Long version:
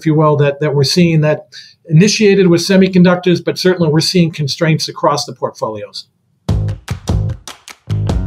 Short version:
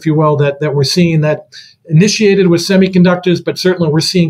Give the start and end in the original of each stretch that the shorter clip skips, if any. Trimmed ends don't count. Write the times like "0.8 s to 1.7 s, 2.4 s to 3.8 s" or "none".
none